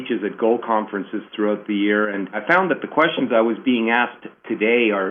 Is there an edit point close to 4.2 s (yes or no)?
no